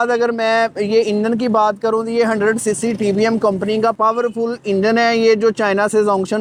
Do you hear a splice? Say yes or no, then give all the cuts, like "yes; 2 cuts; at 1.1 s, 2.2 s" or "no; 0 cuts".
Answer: no; 0 cuts